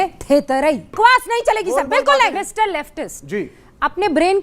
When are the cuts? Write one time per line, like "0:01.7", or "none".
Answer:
0:00.9
0:02.4